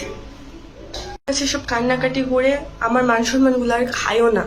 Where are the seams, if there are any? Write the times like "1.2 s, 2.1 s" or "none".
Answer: 1.3 s